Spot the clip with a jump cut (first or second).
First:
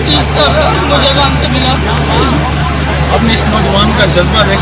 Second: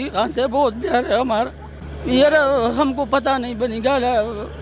second